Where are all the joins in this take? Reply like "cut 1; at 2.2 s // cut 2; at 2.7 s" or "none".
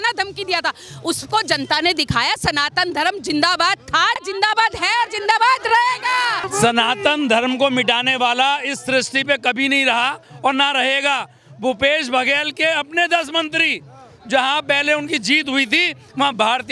cut 1; at 4.2 s // cut 2; at 6.5 s

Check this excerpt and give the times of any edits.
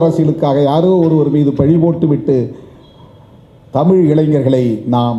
none

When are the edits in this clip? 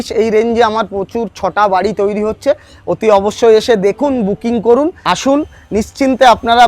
cut 1; at 5.0 s

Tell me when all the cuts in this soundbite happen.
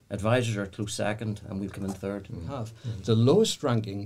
cut 1; at 2.8 s

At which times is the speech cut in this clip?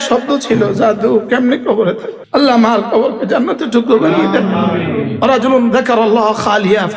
cut 1; at 2.1 s

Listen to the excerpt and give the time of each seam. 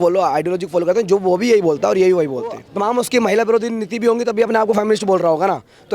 cut 1; at 2.7 s

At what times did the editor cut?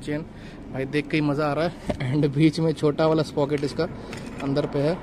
none

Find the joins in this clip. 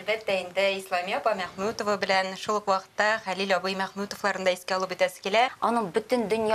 cut 1; at 5.5 s

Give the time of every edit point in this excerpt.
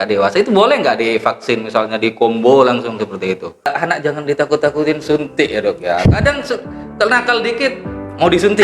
cut 1; at 3.7 s

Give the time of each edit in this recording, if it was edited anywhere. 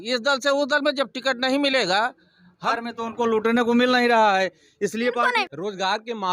cut 1; at 2.7 s // cut 2; at 5.4 s

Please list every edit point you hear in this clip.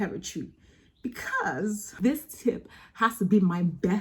cut 1; at 2.0 s

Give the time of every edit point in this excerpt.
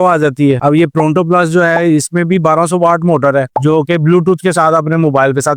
cut 1; at 3.5 s

